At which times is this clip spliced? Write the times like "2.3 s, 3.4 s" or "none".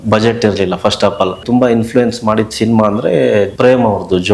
1.4 s, 3.5 s